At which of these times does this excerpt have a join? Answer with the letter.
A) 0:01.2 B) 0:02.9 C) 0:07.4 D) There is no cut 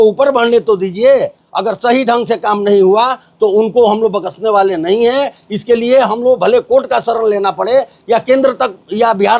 D